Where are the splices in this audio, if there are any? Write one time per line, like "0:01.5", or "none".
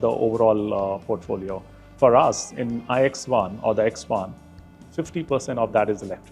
none